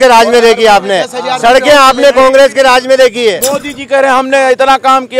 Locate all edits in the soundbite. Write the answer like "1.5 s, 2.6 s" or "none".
3.4 s